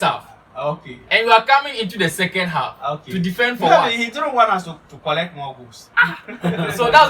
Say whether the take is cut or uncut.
uncut